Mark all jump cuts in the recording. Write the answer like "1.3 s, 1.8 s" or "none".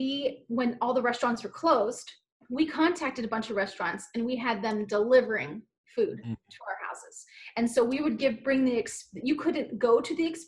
none